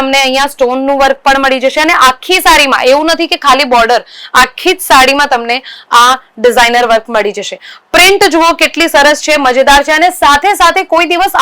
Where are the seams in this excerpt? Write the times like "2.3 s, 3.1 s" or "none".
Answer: none